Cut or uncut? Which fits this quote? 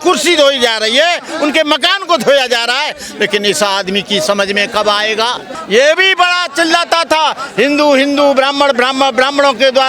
cut